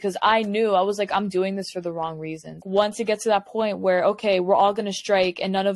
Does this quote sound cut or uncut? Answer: cut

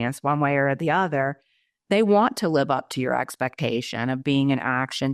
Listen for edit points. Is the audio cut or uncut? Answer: uncut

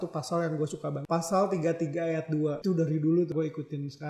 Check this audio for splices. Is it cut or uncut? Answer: cut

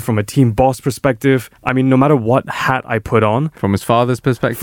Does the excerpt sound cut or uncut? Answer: uncut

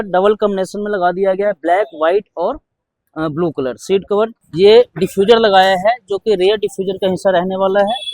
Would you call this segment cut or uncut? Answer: cut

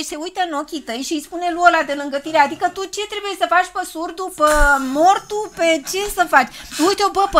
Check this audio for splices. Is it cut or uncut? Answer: uncut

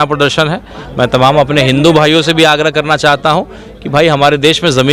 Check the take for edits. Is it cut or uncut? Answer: uncut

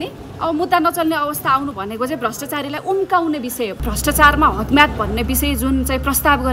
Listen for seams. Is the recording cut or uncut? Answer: cut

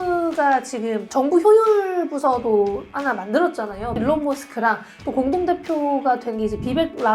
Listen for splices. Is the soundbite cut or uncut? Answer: cut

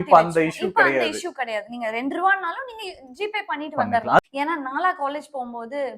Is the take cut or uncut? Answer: cut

